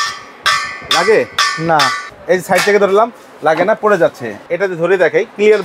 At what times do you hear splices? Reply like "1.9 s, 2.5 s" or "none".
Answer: 2.1 s, 4.4 s